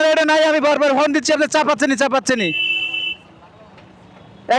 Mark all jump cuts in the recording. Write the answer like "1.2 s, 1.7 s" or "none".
none